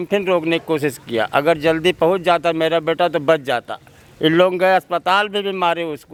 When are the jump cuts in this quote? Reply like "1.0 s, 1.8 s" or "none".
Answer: none